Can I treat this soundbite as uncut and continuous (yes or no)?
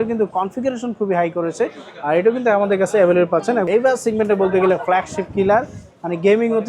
no